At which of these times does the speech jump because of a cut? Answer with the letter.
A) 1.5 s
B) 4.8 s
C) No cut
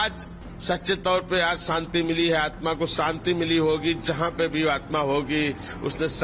C